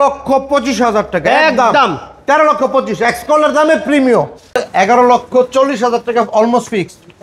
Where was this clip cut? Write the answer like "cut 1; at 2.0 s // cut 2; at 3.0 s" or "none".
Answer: cut 1; at 4.5 s